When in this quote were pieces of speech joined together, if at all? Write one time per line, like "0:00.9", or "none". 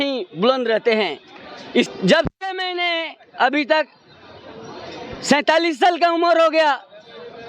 0:01.9